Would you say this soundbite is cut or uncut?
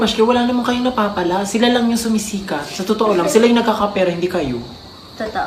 uncut